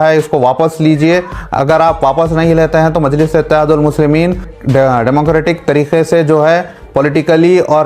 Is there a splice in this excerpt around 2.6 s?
no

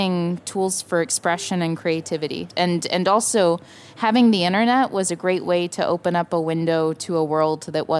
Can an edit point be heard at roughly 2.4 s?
yes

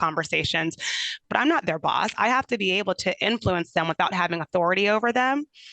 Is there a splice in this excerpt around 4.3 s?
no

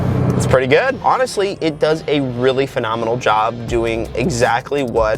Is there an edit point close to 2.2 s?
no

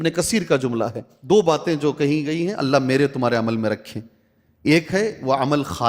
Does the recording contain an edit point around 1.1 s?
yes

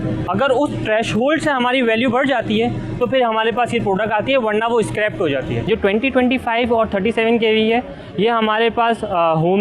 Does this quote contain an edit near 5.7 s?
yes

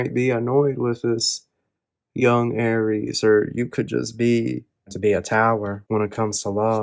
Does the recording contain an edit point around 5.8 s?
yes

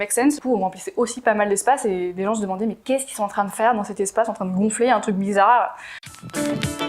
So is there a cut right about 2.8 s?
no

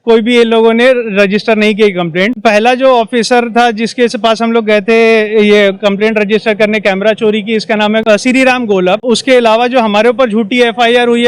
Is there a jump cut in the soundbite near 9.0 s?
yes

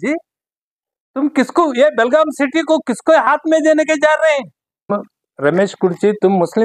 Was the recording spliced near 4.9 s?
yes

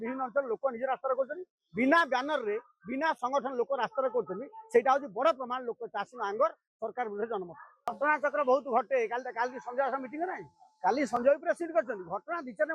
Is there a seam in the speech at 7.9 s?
yes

